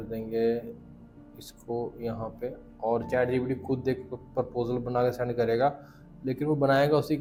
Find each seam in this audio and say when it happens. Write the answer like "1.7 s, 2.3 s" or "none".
none